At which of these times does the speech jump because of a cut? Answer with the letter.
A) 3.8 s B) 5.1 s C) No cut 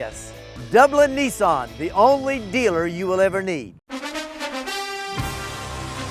A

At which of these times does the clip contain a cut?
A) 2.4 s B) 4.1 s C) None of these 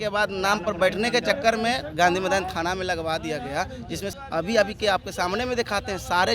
B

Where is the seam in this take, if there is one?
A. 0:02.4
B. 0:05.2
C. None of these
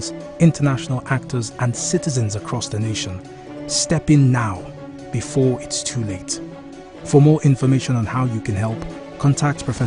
B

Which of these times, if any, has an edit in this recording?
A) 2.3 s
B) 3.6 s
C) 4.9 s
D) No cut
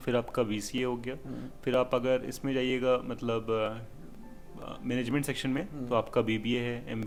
D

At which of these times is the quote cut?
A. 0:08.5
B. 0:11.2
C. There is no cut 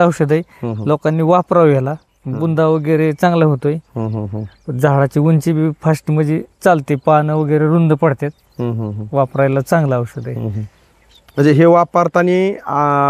C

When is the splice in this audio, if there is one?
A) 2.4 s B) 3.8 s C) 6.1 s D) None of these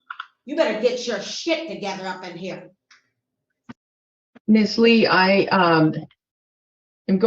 B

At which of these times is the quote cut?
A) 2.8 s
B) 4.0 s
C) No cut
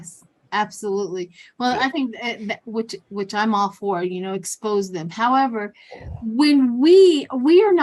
C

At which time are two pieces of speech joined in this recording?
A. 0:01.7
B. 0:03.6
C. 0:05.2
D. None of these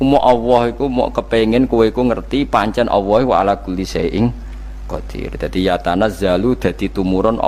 D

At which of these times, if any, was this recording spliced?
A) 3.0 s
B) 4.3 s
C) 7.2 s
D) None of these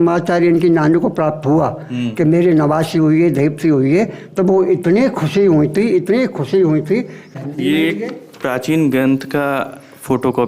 C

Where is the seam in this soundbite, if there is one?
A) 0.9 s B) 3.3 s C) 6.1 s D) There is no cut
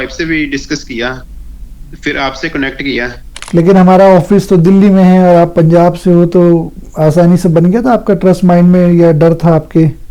B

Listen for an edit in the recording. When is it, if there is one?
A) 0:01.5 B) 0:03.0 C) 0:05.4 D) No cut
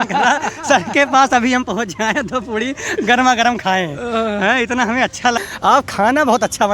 C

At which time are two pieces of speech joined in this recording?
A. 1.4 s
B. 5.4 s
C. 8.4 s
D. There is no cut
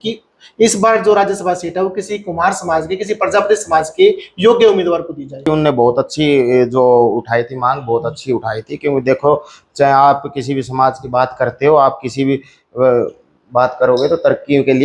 B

